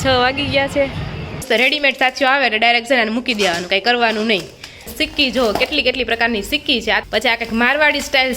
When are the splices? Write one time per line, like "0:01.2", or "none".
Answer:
0:01.4
0:04.9
0:07.0